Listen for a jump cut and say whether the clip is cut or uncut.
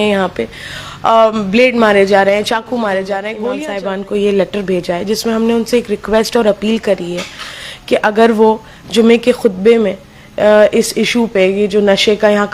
cut